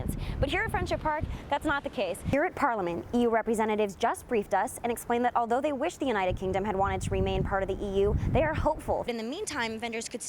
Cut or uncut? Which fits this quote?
cut